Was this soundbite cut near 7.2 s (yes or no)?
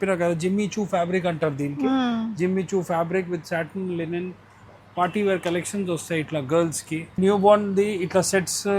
yes